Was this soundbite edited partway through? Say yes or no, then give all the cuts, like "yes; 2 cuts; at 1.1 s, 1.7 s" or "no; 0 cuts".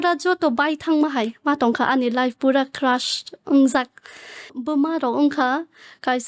yes; 1 cut; at 4.6 s